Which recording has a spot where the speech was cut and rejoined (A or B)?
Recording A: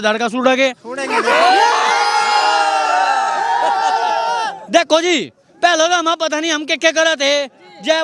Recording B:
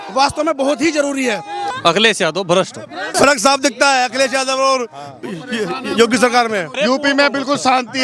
B